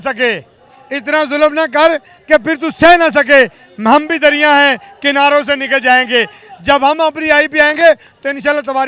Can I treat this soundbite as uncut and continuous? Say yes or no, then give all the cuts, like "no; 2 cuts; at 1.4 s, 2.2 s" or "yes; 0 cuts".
yes; 0 cuts